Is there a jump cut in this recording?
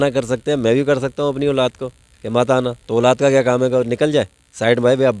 no; 0 cuts

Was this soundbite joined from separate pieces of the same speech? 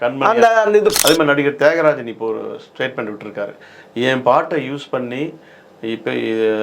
yes; 1 cut; at 1.0 s

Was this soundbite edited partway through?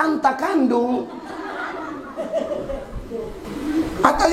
yes; 1 cut; at 3.4 s

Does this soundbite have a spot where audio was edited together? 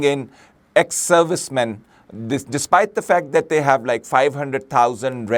no; 0 cuts

